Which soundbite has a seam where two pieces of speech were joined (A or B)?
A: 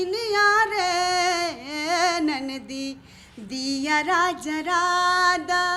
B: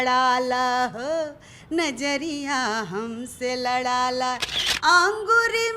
B